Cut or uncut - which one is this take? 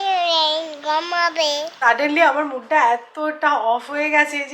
cut